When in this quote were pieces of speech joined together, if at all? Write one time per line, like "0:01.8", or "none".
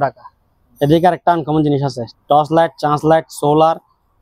none